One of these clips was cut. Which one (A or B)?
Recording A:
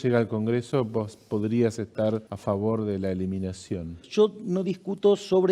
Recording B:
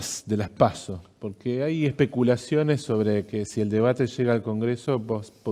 A